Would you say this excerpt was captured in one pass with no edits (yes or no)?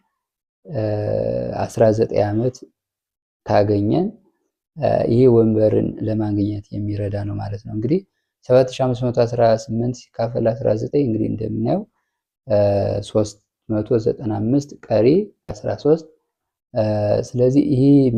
yes